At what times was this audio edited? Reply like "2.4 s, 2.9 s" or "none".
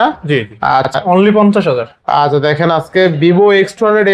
0.9 s